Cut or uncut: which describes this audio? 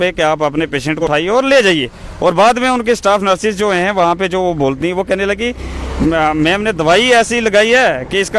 cut